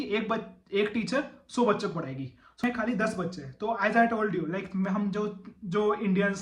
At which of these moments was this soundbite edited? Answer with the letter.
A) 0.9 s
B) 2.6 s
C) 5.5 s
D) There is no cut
B